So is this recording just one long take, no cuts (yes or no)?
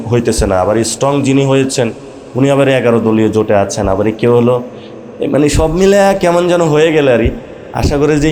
yes